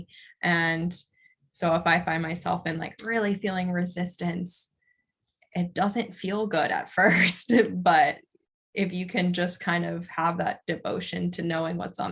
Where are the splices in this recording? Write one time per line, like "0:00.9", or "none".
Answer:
none